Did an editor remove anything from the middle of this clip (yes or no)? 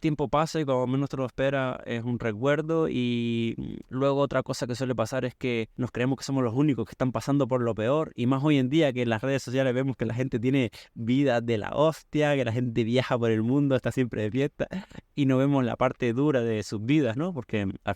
yes